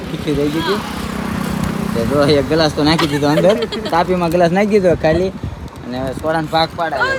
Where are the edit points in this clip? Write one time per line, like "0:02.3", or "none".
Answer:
none